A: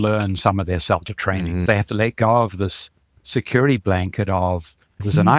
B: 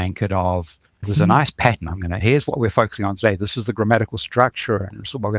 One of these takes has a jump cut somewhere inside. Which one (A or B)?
A